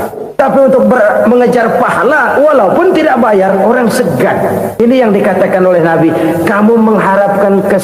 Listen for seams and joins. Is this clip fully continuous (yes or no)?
no